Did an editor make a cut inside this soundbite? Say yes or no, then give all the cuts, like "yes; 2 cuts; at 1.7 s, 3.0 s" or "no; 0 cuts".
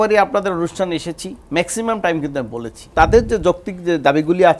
yes; 1 cut; at 2.9 s